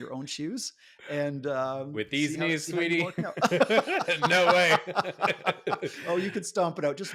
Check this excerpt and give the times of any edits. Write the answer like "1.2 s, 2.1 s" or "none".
none